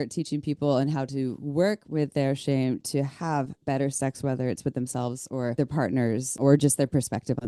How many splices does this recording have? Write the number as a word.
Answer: zero